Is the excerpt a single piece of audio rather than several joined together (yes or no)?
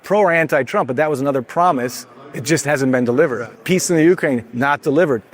no